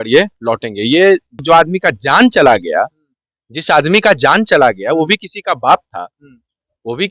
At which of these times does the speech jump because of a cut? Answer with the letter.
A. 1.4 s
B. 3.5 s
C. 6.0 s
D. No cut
A